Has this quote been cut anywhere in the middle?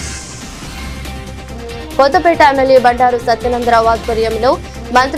no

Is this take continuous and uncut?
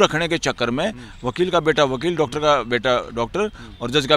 yes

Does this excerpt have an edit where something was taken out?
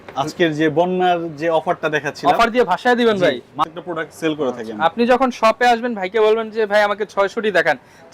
yes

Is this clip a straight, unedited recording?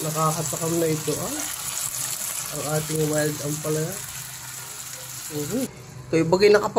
no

